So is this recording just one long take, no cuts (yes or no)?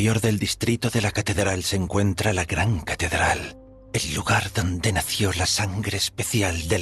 yes